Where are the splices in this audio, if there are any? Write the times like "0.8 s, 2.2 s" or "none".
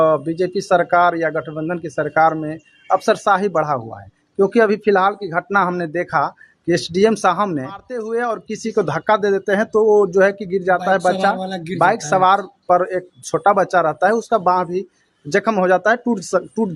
8.0 s